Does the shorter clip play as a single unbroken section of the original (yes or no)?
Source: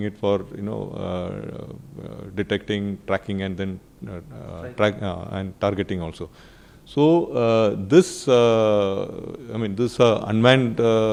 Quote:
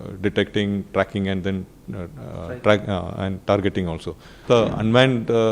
no